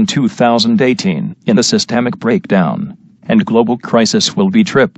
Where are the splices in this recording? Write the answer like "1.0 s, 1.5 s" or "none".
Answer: 1.2 s